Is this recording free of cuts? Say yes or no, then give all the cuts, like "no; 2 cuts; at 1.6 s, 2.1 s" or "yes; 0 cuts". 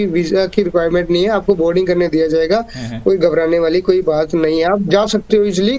yes; 0 cuts